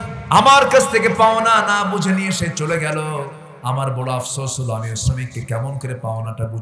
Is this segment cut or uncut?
uncut